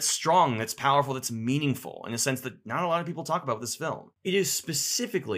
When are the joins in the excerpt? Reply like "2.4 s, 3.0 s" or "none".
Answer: 4.1 s